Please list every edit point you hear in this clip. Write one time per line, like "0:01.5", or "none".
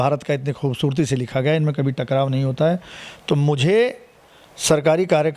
none